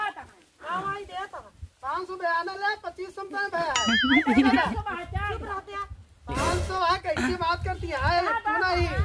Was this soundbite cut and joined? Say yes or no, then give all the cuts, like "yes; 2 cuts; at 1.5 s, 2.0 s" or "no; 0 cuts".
no; 0 cuts